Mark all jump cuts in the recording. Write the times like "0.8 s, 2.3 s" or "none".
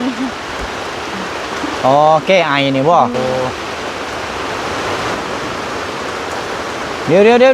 3.1 s